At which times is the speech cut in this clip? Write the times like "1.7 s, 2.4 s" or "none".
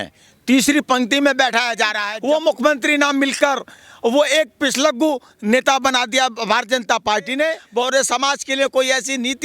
2.1 s, 7.6 s